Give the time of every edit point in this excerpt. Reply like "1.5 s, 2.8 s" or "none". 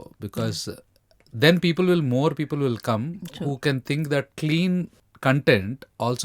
5.0 s